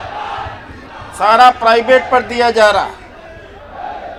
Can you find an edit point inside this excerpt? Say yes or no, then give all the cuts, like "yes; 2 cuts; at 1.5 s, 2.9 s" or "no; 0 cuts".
no; 0 cuts